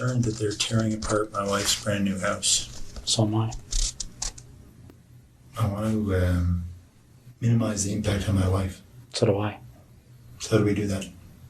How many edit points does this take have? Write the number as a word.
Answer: one